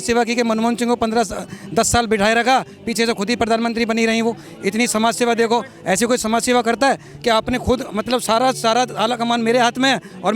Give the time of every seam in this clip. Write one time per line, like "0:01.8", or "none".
none